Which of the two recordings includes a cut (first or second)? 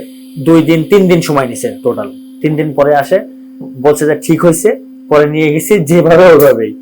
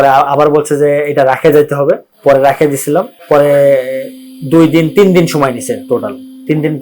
second